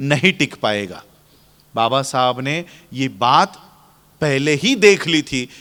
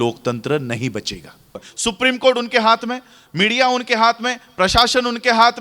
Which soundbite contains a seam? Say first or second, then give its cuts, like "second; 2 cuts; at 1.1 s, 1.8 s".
second; 1 cut; at 1.7 s